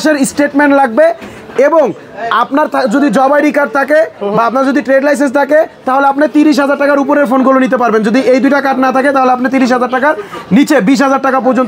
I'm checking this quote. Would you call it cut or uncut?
uncut